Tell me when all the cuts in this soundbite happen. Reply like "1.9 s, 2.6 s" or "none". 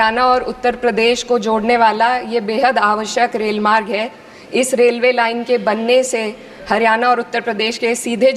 none